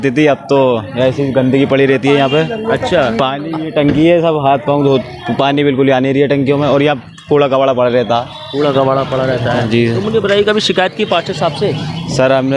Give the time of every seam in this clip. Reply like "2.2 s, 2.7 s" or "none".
none

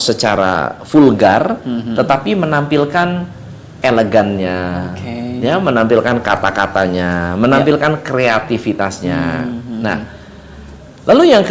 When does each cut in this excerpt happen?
none

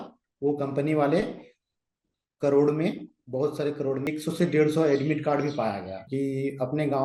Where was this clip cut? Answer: 4.1 s, 6.0 s

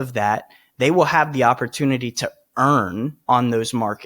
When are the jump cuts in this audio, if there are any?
3.2 s

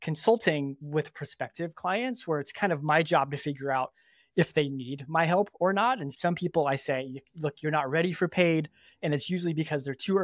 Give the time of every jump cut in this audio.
6.1 s

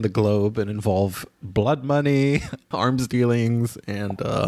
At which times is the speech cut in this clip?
2.7 s

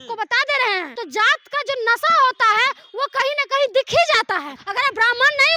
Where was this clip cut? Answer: 0.9 s, 4.6 s

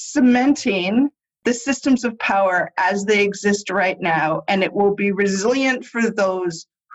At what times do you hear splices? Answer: none

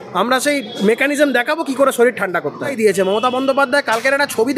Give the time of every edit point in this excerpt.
2.7 s

